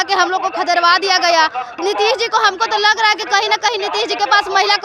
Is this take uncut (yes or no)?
no